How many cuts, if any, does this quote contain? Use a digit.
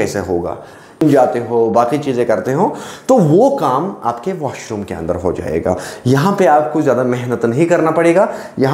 1